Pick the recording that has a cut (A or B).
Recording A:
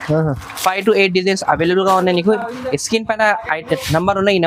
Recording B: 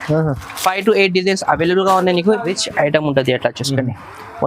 B